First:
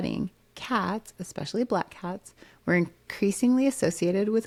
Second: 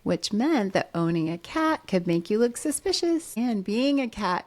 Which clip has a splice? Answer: second; 1 cut; at 3.3 s

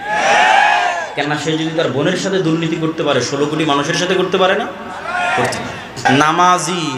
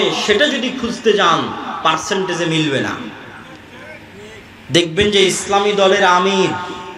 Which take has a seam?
first; 1 cut; at 6.0 s

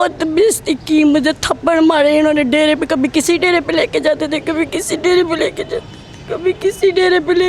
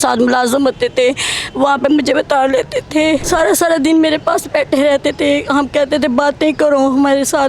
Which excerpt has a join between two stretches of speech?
second; 1 cut; at 3.2 s

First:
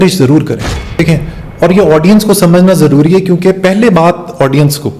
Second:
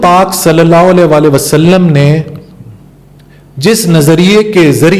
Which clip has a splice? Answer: first; 1 cut; at 1.0 s

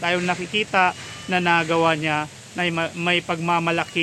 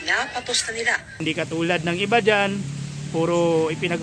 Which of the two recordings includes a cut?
second; 1 cut; at 1.2 s

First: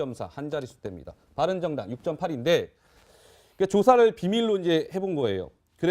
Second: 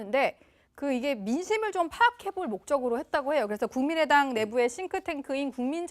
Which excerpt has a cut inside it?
first; 1 cut; at 4.7 s

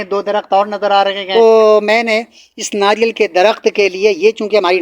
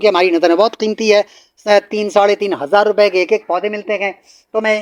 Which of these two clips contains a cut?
first; 1 cut; at 1.2 s

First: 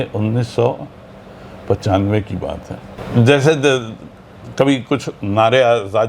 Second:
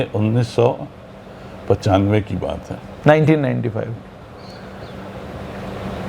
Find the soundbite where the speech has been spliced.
first; 1 cut; at 2.9 s

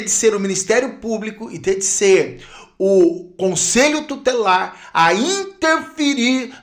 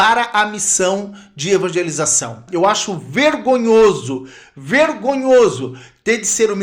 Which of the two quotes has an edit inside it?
second; 1 cut; at 2.4 s

